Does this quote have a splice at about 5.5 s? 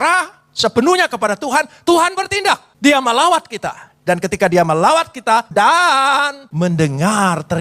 yes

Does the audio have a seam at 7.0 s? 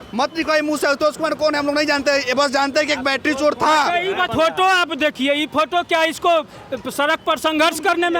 no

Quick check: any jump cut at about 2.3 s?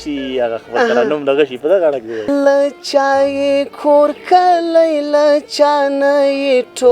yes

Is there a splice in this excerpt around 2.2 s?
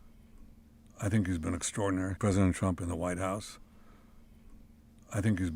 yes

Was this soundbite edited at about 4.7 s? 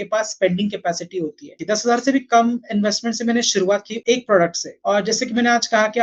yes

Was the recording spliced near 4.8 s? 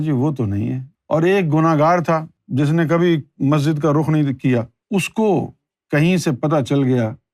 yes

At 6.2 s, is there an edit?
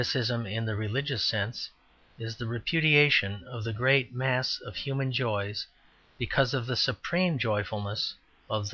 no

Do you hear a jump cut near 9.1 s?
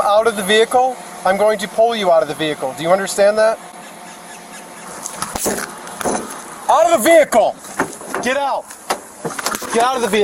yes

